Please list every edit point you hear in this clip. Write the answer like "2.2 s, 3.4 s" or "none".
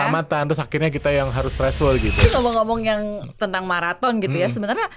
2.2 s